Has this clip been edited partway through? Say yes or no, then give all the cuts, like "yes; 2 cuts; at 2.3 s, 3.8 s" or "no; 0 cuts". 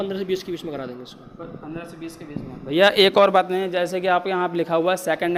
no; 0 cuts